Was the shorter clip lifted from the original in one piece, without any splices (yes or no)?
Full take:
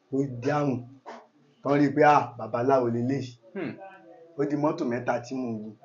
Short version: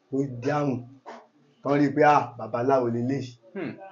yes